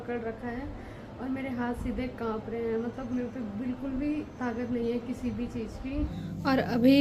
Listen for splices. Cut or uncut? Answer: uncut